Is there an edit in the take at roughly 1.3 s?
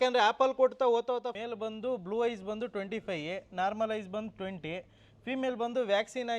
yes; 1 cut; at 1.3 s

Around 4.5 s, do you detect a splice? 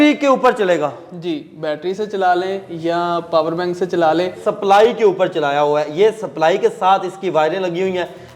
yes; 1 cut; at 4.5 s

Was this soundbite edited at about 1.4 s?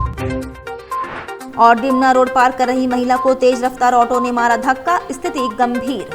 yes; 1 cut; at 1.4 s

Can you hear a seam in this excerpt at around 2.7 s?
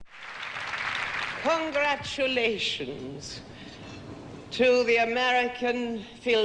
yes; 1 cut; at 2.7 s

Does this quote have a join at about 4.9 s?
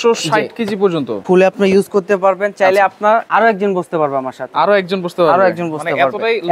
no; 2 cuts; at 1.2 s, 3.3 s

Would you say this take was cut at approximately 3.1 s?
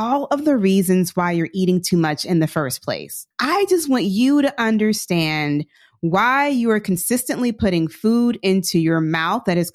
yes; 1 cut; at 3.1 s

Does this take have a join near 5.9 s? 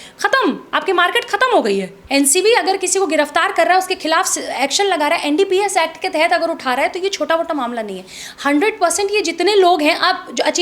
no; 1 cut; at 2.0 s

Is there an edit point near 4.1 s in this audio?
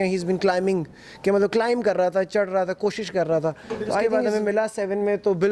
yes; 1 cut; at 4.1 s

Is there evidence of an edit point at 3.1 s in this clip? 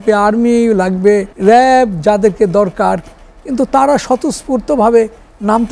no; 1 cut; at 1.3 s

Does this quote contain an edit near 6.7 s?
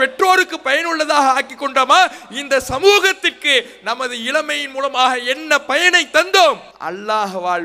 yes; 1 cut; at 6.7 s

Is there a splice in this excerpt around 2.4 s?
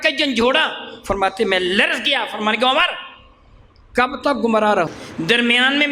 no; 1 cut; at 4.9 s

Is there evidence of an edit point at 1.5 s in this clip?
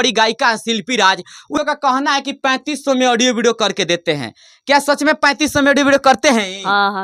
yes; 1 cut; at 1.5 s

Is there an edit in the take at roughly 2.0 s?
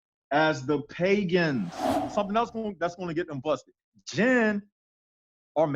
yes; 1 cut; at 2.0 s

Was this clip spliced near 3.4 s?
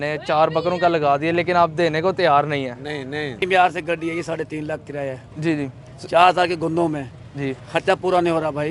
yes; 1 cut; at 3.4 s

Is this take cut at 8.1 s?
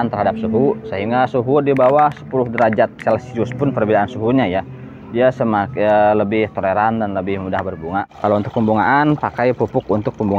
yes; 1 cut; at 8.1 s

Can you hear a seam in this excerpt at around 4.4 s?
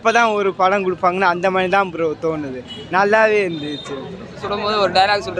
yes; 1 cut; at 4.4 s

